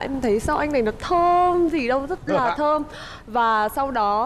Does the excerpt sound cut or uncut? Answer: uncut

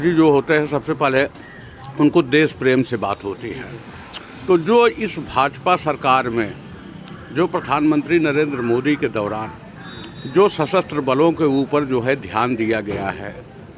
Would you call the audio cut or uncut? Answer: uncut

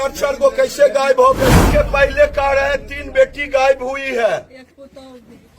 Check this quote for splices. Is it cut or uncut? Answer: cut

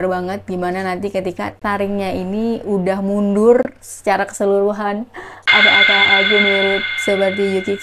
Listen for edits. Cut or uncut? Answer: uncut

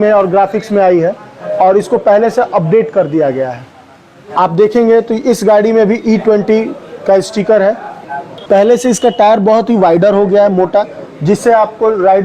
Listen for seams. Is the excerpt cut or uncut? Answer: cut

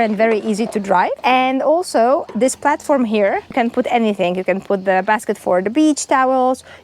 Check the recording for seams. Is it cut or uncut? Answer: cut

